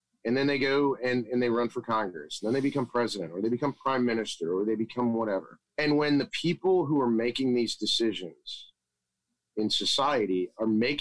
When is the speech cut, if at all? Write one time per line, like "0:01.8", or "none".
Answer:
0:05.6